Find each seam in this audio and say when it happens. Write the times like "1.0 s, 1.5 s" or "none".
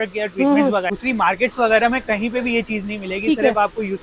0.9 s